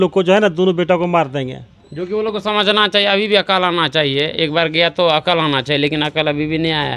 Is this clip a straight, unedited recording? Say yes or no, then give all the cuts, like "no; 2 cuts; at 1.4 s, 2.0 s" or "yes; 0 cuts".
yes; 0 cuts